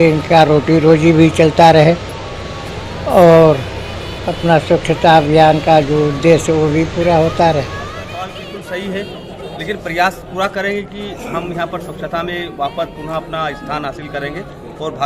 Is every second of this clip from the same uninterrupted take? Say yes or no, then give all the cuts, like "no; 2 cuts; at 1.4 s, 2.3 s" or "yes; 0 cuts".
no; 1 cut; at 8.0 s